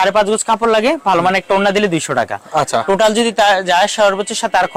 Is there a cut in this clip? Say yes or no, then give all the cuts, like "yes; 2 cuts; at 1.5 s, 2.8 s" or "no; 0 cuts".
no; 0 cuts